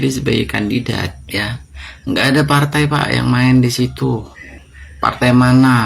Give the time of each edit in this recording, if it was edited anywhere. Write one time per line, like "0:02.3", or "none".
0:01.2